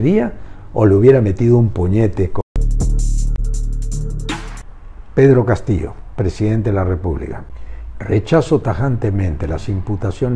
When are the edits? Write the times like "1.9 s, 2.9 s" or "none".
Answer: 2.4 s, 7.4 s